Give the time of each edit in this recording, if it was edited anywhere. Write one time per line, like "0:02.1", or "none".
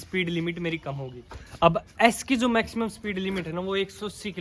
none